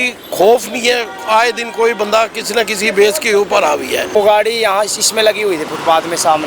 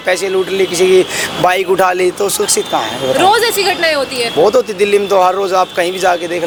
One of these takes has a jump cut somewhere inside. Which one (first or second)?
first